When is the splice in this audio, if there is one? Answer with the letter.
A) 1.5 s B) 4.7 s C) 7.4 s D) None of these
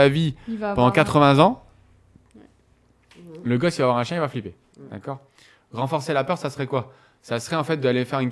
B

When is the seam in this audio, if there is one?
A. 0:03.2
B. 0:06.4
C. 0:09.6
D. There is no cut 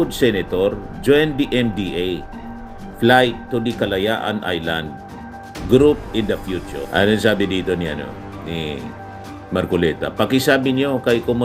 D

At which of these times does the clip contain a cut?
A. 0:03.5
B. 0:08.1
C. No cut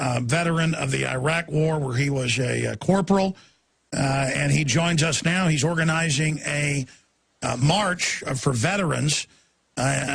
B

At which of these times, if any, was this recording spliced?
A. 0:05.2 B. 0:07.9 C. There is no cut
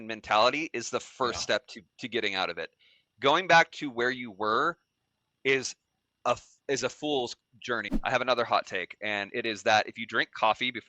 B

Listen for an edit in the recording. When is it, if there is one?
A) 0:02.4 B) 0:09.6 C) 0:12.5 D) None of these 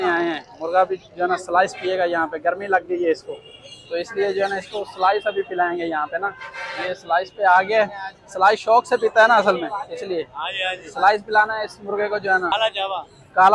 C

